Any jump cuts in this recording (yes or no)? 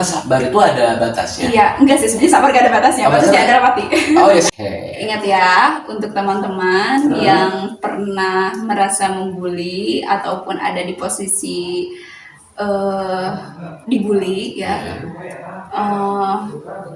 yes